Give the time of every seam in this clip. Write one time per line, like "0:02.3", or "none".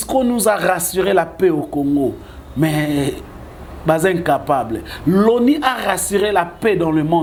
none